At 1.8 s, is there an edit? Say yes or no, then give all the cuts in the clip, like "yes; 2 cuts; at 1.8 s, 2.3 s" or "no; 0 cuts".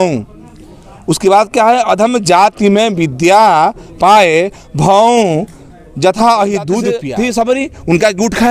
no; 1 cut; at 7.0 s